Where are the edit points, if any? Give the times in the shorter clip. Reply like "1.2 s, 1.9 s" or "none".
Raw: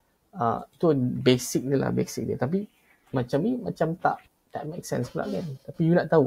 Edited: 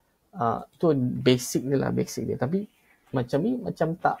none